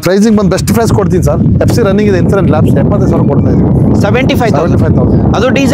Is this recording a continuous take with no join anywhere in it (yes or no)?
yes